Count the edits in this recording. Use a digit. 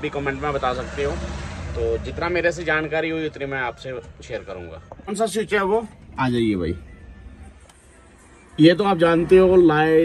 0